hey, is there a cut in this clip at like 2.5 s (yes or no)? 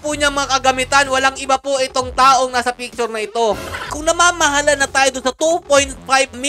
no